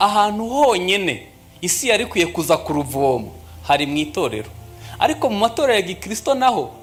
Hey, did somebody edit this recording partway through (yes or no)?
no